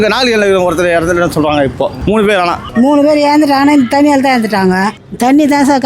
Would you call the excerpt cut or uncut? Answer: cut